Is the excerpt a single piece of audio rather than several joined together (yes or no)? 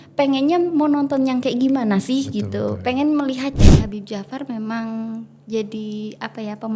no